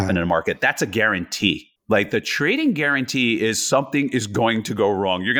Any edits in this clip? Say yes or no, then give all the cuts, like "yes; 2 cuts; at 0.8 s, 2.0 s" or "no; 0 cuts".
yes; 1 cut; at 1.7 s